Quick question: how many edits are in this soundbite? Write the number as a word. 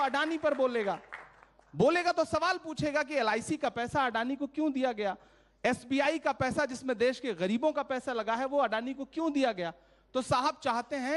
zero